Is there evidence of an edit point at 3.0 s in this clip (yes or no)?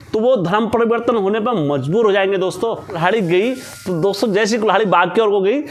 yes